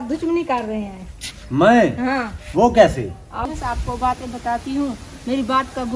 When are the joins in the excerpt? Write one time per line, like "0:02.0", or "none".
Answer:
0:03.5